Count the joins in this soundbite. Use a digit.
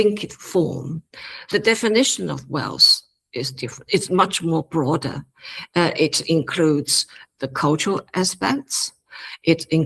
1